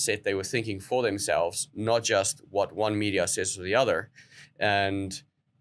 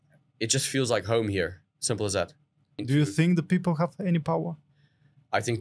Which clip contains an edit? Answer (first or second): second